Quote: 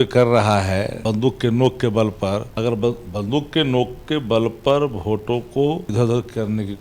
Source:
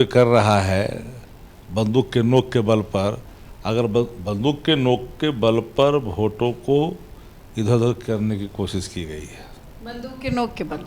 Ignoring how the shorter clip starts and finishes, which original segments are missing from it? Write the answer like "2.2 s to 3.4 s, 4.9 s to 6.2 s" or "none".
0.9 s to 1.7 s, 3.2 s to 3.6 s, 7.0 s to 7.6 s